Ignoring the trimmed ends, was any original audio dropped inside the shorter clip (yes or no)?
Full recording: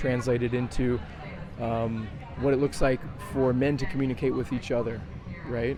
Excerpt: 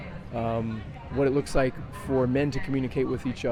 no